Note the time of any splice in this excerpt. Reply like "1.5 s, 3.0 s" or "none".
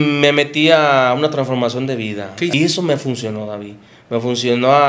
2.5 s